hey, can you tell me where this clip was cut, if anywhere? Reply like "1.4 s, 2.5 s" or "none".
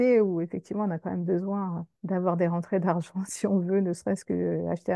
1.9 s